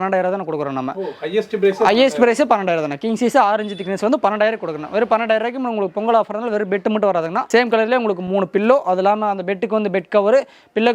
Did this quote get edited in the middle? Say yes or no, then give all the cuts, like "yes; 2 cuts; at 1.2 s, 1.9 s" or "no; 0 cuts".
no; 0 cuts